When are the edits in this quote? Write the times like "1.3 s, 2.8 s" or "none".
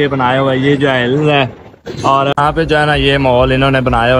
2.3 s